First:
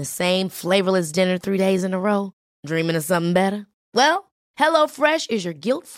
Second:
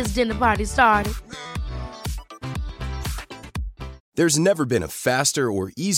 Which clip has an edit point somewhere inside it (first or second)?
second